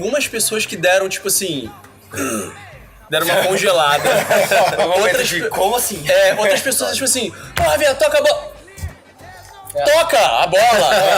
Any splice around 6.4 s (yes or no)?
no